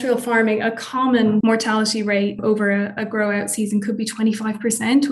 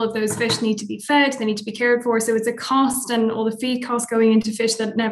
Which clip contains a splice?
first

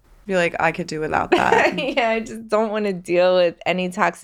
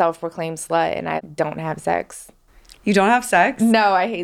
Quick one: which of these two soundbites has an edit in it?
second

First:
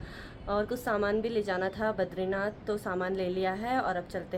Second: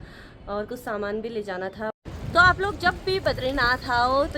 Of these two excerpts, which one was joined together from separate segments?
second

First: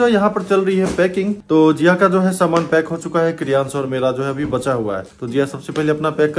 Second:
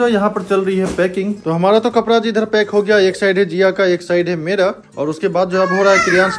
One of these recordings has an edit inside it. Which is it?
second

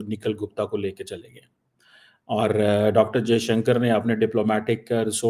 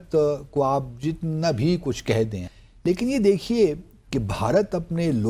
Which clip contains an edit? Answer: second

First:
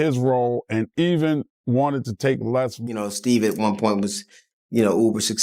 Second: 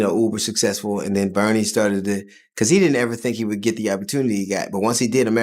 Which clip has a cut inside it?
first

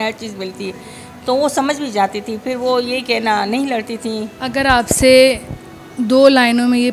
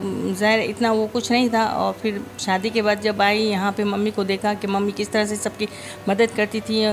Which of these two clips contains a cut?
first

